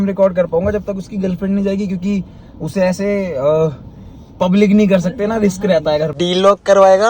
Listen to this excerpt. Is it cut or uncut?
cut